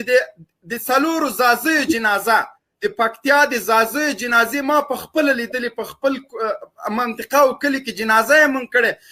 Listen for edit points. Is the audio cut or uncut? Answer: uncut